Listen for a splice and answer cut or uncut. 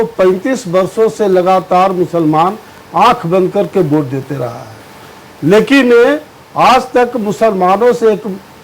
uncut